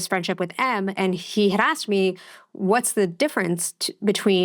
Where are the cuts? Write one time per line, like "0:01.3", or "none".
0:01.0

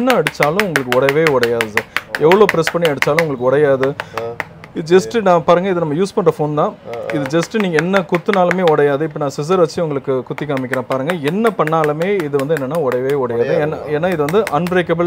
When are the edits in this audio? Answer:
none

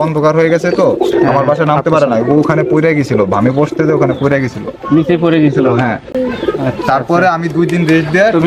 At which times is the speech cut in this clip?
none

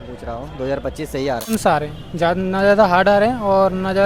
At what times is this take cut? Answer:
0:01.5

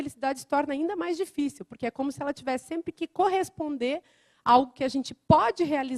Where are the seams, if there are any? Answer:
none

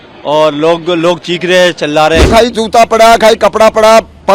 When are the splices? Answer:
0:02.3

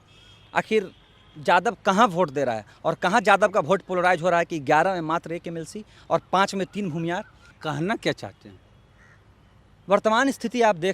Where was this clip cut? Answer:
0:07.5

